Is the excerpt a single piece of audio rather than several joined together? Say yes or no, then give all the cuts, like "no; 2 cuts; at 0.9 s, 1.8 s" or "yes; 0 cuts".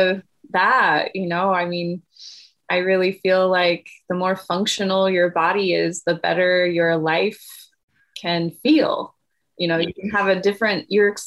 yes; 0 cuts